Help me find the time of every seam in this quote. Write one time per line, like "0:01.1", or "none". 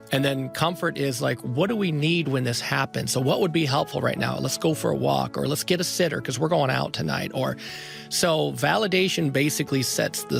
none

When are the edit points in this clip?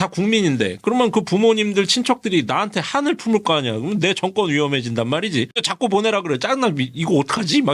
none

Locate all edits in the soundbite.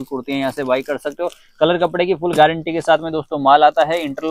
none

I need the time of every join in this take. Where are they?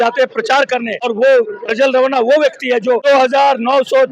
0:01.0
0:03.0

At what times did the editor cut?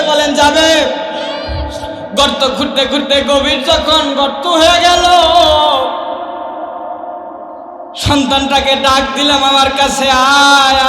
0:01.7

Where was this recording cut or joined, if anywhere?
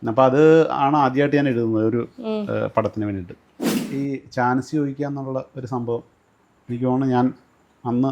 0:03.8

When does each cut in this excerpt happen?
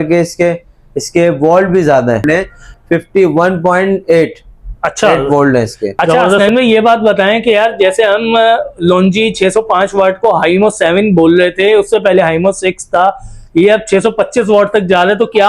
0:02.2
0:06.3

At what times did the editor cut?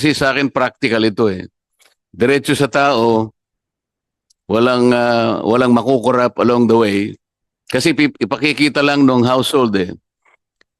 none

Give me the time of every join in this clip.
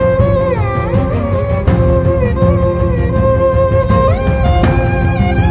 none

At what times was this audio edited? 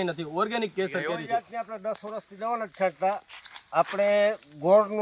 0:01.2

